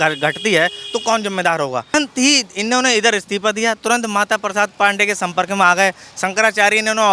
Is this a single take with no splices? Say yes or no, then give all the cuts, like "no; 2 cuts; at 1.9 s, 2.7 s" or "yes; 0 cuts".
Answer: no; 1 cut; at 1.9 s